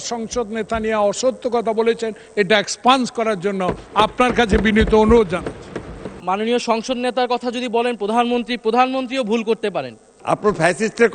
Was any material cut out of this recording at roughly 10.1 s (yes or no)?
yes